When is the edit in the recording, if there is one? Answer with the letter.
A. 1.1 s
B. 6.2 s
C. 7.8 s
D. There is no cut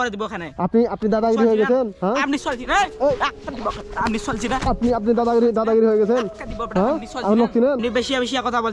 C